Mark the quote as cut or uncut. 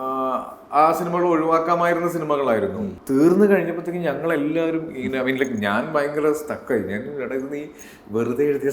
cut